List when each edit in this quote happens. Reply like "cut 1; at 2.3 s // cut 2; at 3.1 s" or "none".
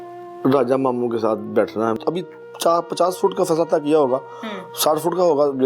cut 1; at 2.0 s